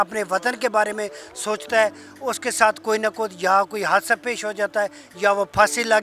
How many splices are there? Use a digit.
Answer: 0